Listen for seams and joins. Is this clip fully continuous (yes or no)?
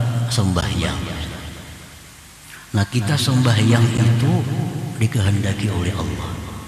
yes